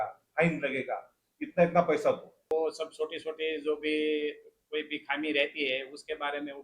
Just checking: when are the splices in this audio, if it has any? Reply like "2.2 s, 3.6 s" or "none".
2.3 s